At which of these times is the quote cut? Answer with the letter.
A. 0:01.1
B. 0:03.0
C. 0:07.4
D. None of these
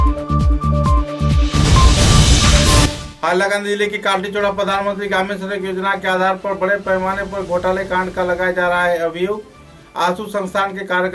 B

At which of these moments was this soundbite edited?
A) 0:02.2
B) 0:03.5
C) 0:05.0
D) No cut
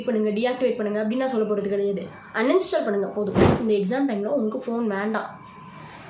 B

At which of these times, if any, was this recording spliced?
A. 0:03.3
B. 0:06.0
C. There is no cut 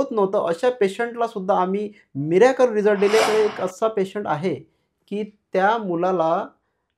A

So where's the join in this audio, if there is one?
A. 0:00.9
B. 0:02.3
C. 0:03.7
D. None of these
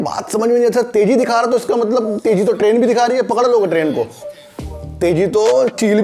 D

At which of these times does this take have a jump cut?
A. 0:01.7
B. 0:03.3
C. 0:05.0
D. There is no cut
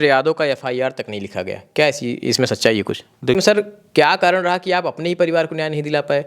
B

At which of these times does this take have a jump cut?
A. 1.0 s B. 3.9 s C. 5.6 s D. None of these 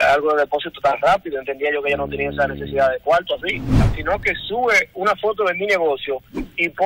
B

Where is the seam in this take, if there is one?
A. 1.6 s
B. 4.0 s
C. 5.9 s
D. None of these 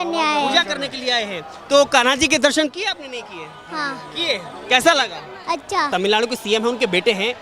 C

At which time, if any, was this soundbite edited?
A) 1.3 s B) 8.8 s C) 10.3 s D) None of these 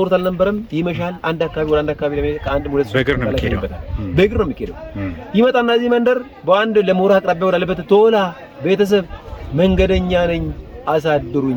D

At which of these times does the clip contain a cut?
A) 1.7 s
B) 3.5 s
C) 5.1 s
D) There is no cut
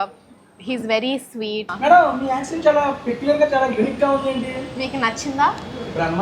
A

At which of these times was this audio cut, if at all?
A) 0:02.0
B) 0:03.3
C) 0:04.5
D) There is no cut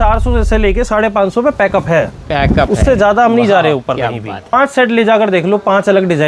C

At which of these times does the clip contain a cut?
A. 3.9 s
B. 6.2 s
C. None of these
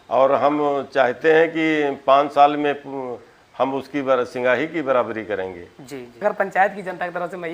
B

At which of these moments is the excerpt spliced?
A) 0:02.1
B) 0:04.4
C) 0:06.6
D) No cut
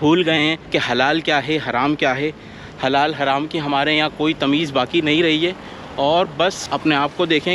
C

